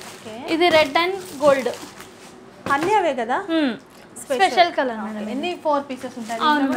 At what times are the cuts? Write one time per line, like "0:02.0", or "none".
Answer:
none